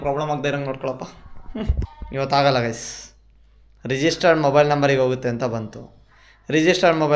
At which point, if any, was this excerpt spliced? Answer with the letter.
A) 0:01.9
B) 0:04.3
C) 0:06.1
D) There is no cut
A